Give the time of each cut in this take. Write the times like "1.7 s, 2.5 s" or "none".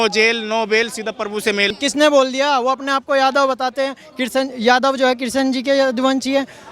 1.7 s